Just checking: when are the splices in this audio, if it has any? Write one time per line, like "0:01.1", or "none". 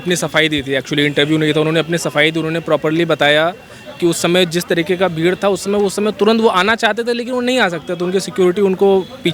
none